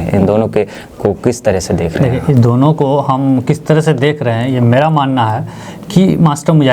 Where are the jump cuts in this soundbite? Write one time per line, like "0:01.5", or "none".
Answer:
none